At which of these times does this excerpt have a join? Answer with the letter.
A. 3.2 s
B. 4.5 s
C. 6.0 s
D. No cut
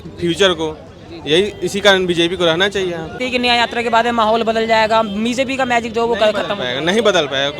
A